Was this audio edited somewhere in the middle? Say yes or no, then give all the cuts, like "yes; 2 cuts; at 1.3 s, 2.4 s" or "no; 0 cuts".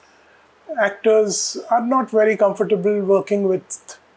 no; 0 cuts